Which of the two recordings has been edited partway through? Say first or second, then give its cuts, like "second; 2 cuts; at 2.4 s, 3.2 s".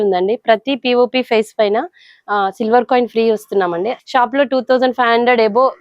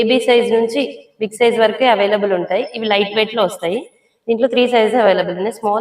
first; 1 cut; at 3.9 s